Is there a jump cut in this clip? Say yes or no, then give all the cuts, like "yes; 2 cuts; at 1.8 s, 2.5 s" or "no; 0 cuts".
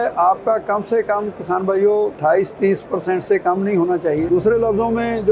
yes; 1 cut; at 4.3 s